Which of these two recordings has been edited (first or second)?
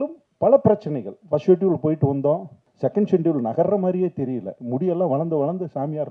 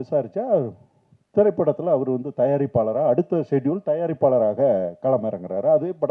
first